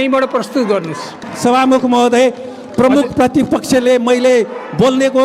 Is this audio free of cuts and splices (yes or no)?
no